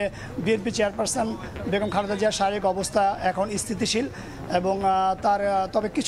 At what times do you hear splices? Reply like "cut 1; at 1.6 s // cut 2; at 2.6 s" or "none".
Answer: none